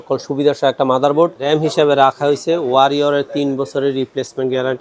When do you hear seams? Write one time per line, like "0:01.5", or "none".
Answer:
0:01.4